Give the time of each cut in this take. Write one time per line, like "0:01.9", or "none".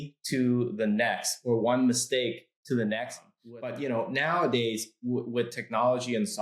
0:03.3